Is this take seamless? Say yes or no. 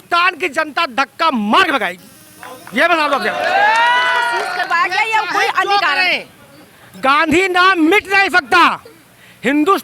no